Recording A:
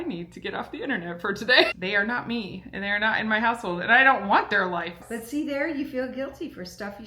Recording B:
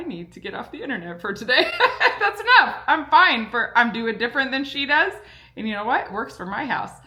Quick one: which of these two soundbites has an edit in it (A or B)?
A